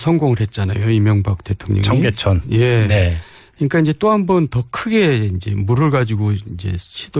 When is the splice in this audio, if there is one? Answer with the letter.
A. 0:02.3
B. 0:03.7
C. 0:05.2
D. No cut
A